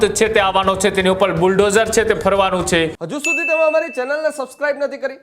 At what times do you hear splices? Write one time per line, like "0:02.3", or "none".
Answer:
0:03.0